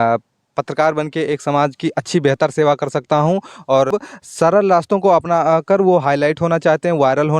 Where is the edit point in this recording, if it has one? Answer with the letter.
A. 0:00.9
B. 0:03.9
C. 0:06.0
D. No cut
B